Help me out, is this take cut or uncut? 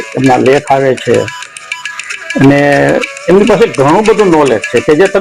uncut